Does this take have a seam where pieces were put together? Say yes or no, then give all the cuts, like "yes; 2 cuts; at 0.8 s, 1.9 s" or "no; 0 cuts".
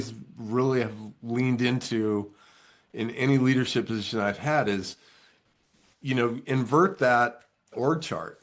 no; 0 cuts